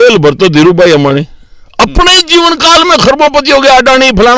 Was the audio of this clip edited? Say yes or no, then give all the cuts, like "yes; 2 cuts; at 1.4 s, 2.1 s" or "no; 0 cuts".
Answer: no; 0 cuts